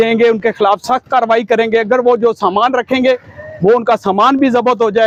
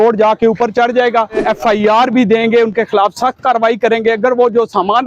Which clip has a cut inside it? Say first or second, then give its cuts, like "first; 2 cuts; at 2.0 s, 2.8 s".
second; 1 cut; at 1.4 s